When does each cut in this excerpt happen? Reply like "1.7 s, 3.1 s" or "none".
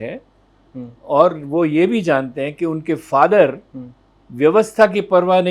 none